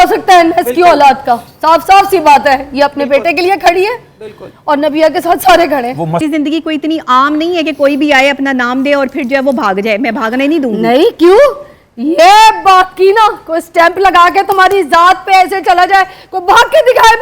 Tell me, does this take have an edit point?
yes; 1 cut; at 6.2 s

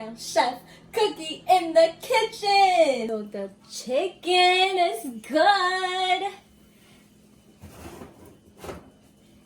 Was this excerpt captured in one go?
no; 1 cut; at 3.1 s

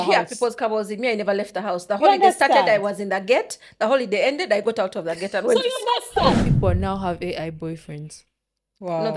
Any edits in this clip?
yes; 1 cut; at 6.5 s

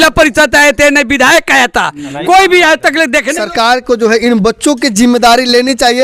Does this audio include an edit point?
yes; 1 cut; at 3.4 s

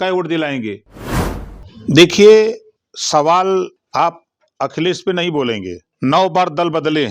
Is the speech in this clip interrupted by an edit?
yes; 1 cut; at 1.2 s

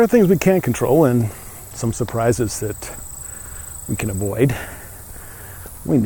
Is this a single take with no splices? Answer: yes; 0 cuts

